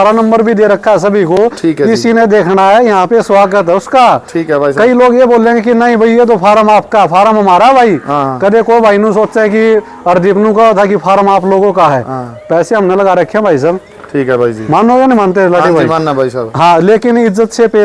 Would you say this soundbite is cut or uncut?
uncut